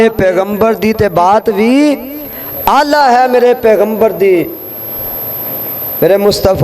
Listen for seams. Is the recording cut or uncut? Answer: uncut